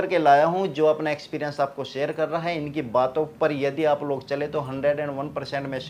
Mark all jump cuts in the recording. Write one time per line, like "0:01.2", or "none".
none